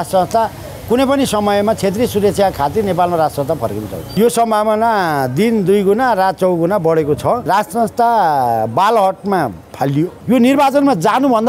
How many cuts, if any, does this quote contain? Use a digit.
3